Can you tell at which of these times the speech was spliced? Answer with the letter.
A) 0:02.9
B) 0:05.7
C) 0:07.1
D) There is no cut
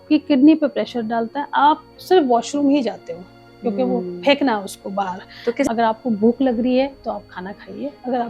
B